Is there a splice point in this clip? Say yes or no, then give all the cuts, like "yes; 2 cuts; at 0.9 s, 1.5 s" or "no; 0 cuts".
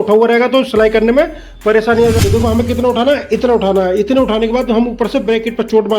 yes; 1 cut; at 2.2 s